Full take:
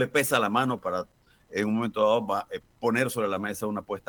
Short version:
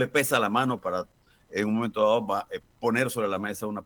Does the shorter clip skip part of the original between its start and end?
no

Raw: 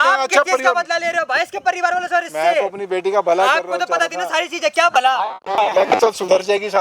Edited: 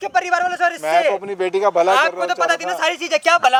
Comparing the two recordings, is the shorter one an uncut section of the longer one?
yes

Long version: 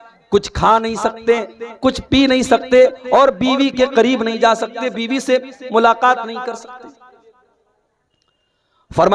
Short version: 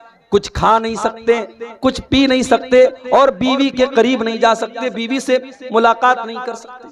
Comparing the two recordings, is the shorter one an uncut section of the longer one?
yes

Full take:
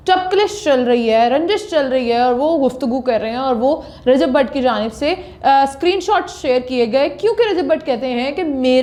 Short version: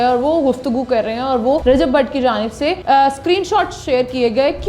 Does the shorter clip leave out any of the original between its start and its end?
yes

